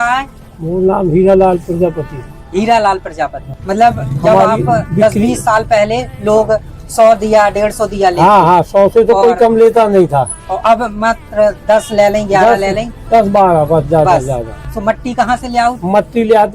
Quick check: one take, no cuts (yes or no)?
no